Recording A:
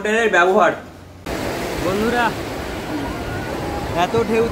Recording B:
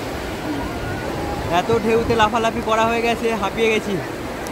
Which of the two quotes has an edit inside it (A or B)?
A